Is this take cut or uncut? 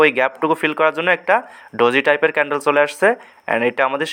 uncut